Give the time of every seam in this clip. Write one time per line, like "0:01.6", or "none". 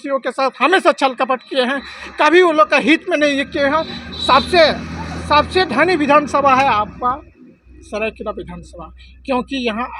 none